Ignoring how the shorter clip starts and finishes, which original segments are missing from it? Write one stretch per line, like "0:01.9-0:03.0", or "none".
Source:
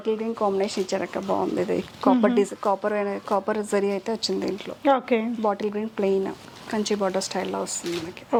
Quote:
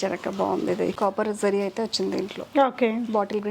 0:01.8-0:03.2